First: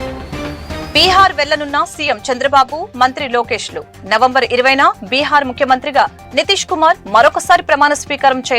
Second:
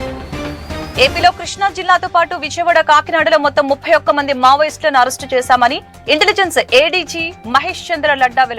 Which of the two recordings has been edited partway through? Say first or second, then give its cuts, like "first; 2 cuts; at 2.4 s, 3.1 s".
first; 1 cut; at 1.0 s